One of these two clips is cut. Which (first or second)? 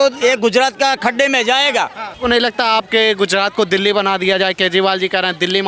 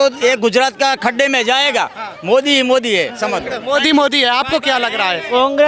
first